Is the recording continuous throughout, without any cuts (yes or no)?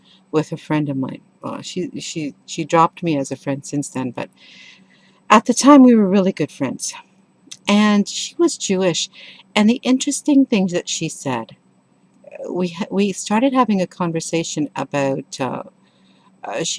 no